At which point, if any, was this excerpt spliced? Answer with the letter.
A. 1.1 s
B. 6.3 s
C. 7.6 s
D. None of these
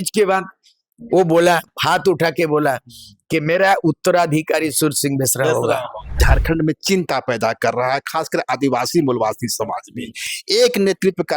B